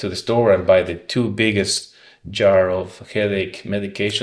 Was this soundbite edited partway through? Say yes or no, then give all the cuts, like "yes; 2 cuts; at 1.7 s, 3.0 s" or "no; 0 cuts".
no; 0 cuts